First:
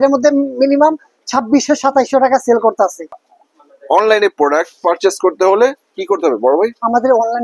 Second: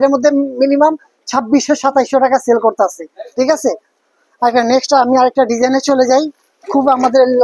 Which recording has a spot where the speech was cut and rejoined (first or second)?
first